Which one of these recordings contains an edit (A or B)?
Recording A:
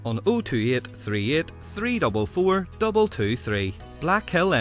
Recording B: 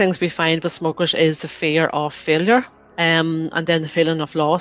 B